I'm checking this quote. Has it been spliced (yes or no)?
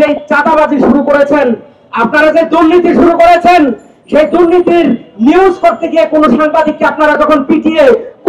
no